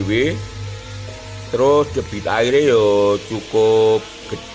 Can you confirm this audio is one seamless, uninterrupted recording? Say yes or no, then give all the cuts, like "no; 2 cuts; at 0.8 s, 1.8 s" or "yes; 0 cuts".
yes; 0 cuts